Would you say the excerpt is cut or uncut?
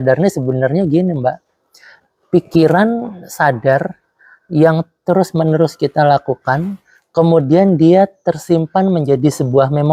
uncut